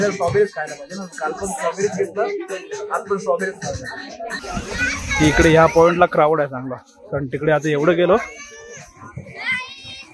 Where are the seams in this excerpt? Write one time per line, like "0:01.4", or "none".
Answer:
0:04.4